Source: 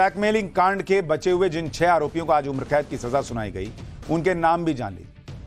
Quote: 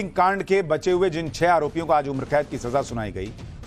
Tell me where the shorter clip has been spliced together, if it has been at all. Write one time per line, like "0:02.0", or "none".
none